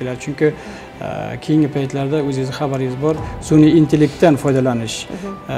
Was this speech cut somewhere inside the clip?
no; 0 cuts

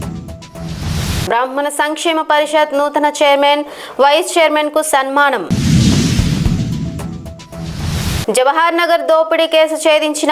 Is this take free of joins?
yes; 0 cuts

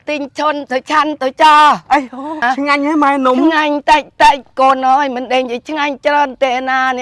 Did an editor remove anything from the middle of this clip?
yes; 1 cut; at 2.4 s

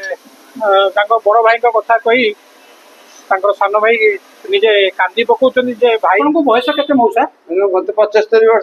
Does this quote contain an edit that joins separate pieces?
yes; 1 cut; at 6.2 s

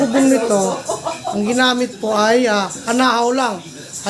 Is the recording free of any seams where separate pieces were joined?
yes; 0 cuts

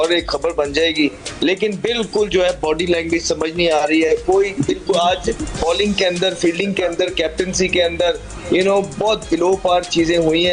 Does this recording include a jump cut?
no; 0 cuts

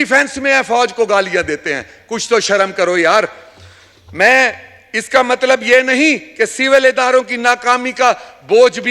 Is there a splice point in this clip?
no; 0 cuts

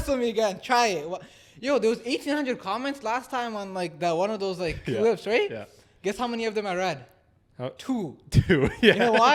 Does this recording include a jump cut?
no; 0 cuts

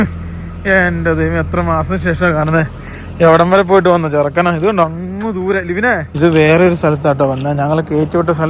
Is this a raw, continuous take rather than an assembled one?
yes; 0 cuts

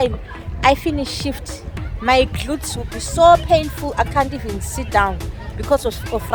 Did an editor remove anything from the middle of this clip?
no; 0 cuts

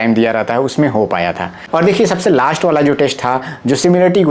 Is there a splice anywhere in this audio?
yes; 1 cut; at 1.6 s

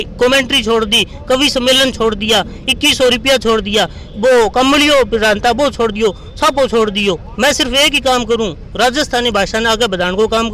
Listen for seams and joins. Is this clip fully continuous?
yes; 0 cuts

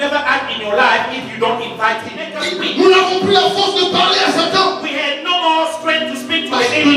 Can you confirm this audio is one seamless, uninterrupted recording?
no; 1 cut; at 2.2 s

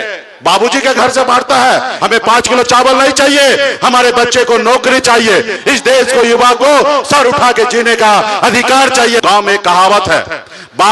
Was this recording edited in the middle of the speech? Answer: yes; 3 cuts; at 1.9 s, 5.5 s, 9.2 s

